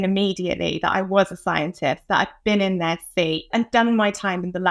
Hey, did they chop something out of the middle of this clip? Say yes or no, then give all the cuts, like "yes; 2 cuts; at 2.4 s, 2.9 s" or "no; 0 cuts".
yes; 1 cut; at 3.5 s